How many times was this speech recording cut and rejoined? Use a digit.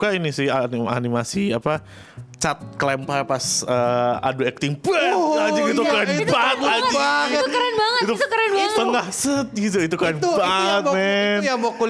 0